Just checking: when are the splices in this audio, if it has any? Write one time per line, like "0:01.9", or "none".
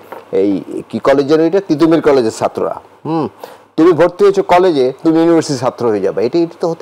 none

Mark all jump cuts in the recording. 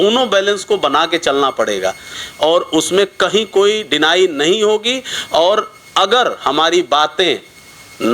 0:02.1

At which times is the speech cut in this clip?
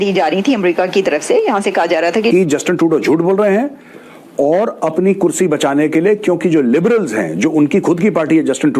0:02.3

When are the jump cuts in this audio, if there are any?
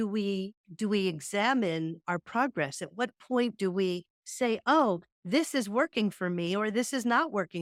none

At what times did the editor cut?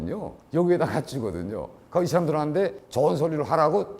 0:01.7

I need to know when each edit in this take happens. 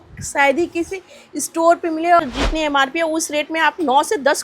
0:02.2

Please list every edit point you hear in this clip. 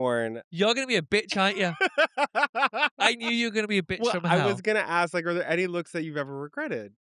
none

